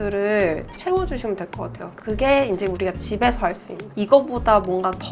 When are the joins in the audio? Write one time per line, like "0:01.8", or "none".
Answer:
0:00.7
0:01.9